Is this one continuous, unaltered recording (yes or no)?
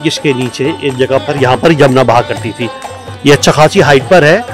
yes